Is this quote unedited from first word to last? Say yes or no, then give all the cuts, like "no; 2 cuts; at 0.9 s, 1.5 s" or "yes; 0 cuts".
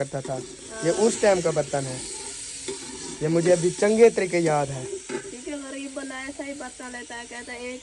yes; 0 cuts